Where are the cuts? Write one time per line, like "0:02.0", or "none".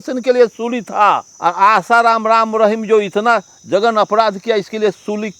0:01.3